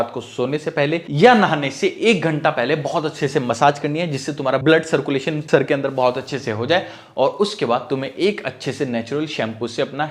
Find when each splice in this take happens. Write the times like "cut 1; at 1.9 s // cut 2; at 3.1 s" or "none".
none